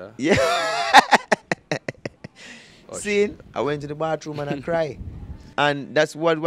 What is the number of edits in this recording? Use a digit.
0